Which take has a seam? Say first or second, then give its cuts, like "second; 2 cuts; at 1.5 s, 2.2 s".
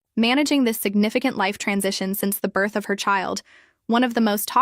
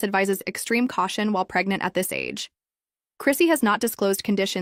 first; 1 cut; at 3.0 s